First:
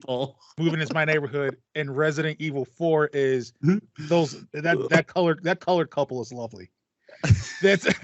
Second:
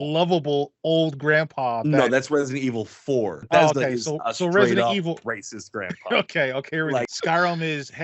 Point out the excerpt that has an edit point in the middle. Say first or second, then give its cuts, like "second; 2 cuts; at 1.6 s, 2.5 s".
second; 2 cuts; at 3.4 s, 7.1 s